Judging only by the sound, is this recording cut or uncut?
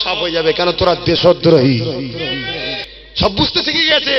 cut